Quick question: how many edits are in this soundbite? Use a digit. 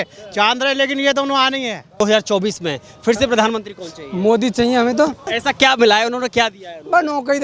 2